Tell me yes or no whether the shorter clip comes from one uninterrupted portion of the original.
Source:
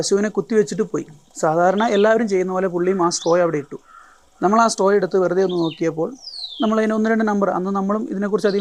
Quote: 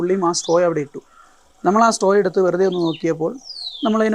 yes